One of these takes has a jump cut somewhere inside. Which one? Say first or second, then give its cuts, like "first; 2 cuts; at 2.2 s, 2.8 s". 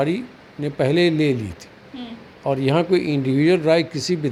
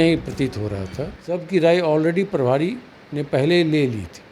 second; 1 cut; at 1.4 s